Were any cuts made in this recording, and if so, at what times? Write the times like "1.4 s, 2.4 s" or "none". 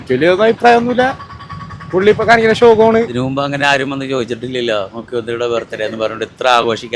3.1 s

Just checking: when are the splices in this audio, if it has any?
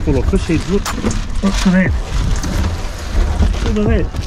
0.9 s

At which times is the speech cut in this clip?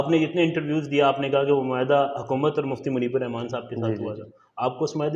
none

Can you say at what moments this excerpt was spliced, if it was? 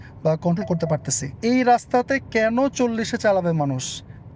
1.3 s

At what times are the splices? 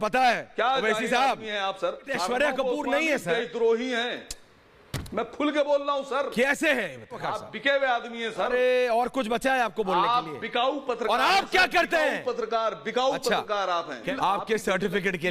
2.0 s, 7.2 s, 14.1 s

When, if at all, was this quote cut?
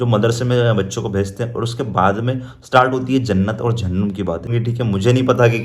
4.6 s

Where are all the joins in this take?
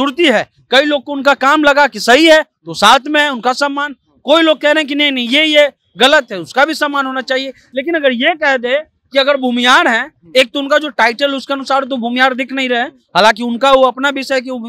none

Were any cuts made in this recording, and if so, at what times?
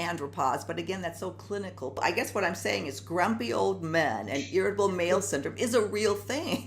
2.0 s

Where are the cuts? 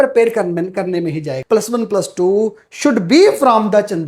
1.4 s

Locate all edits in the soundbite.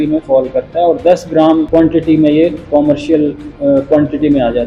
1.7 s, 3.5 s

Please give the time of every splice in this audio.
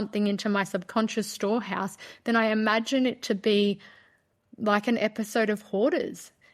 none

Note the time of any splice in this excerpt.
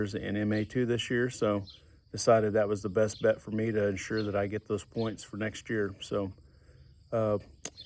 none

